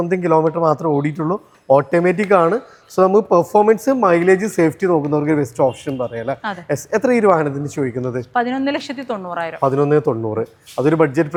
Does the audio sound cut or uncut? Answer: uncut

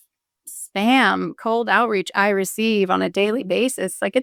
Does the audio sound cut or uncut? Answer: uncut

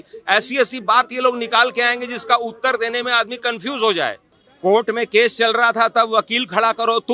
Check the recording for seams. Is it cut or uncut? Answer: cut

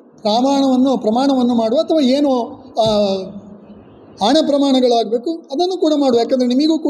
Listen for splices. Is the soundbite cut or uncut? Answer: uncut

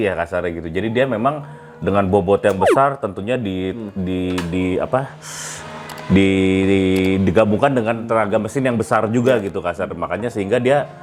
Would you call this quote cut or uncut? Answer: uncut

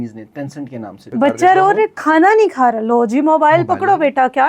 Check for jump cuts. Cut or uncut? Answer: cut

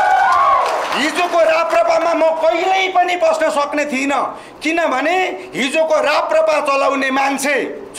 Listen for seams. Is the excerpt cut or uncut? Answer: uncut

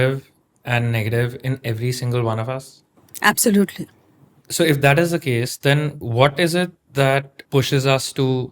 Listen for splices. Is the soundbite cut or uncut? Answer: cut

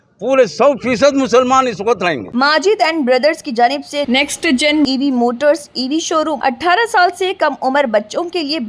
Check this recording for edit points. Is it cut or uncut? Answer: cut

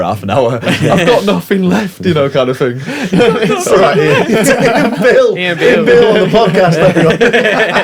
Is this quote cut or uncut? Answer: uncut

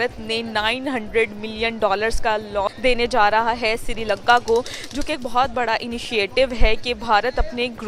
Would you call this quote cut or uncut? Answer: uncut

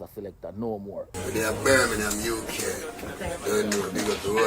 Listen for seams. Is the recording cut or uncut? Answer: cut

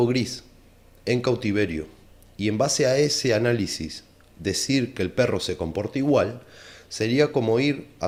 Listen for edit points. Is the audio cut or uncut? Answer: uncut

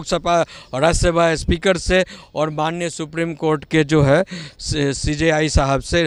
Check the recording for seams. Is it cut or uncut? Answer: uncut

